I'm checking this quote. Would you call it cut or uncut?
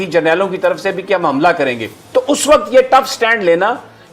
uncut